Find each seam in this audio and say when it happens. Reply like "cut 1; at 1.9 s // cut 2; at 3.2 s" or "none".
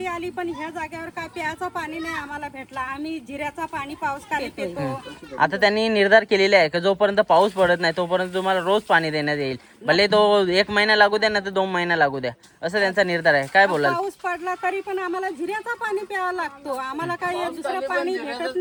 none